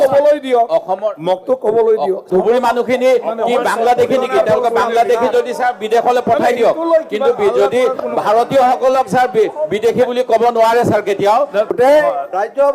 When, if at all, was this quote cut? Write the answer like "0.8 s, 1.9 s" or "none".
2.3 s, 11.7 s